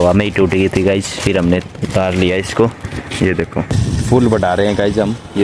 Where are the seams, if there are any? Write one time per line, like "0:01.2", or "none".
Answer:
0:03.7